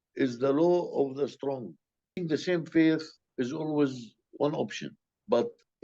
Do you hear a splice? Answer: yes; 2 cuts; at 2.2 s, 3.2 s

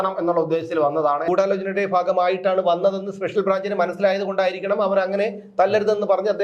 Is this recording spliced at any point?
yes; 1 cut; at 1.2 s

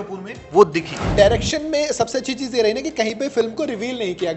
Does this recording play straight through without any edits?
no; 1 cut; at 1.0 s

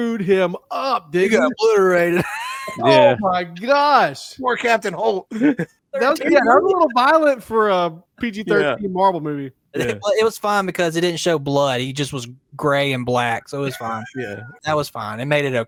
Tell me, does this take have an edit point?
no; 0 cuts

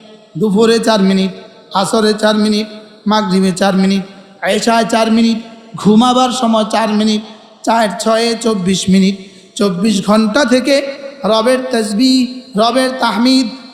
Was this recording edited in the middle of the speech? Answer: no; 0 cuts

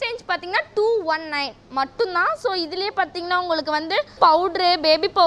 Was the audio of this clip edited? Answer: yes; 1 cut; at 4.1 s

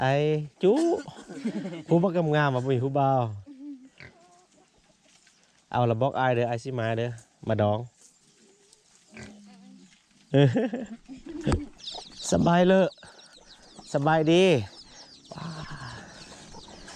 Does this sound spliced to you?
yes; 1 cut; at 11.7 s

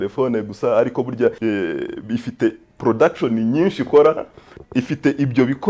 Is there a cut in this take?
yes; 2 cuts; at 1.4 s, 4.5 s

